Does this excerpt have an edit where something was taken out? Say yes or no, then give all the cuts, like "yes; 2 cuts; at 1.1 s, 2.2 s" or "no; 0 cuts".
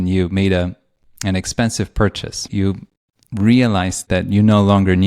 yes; 2 cuts; at 2.5 s, 4.0 s